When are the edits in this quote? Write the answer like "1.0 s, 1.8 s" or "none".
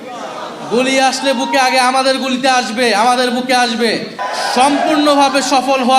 4.2 s